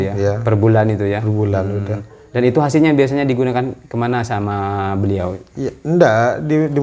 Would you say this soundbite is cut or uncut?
uncut